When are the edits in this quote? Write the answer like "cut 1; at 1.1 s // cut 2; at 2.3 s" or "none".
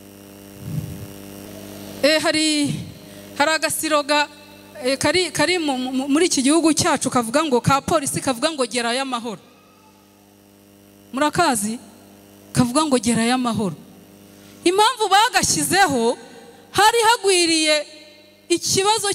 cut 1; at 1.5 s